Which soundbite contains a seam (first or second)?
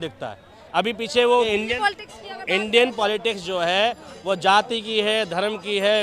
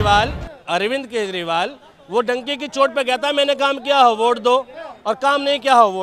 first